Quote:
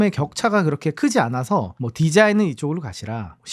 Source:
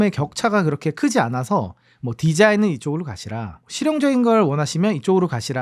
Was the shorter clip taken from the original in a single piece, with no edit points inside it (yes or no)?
no